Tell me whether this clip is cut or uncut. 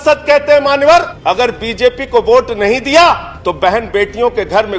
cut